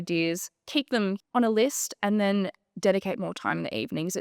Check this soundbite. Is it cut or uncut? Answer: cut